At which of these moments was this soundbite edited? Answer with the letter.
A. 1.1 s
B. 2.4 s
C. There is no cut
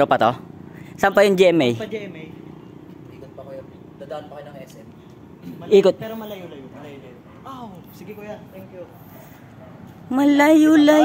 C